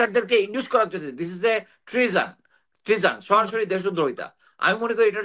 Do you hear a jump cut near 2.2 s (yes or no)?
no